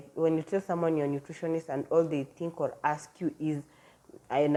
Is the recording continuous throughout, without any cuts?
yes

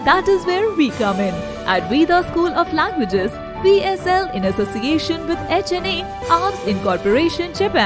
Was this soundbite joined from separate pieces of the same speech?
no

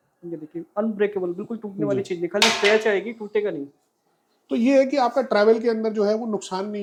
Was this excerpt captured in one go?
yes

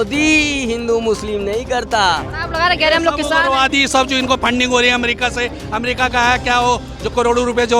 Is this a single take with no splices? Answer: no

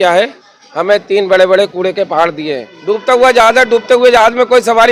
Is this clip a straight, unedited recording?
no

